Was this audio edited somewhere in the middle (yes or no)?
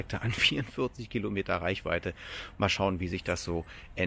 no